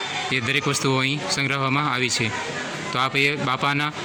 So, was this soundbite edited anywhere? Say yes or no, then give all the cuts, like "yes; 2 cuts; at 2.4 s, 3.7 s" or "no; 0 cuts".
no; 0 cuts